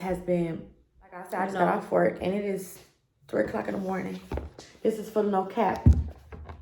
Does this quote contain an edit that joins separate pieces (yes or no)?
yes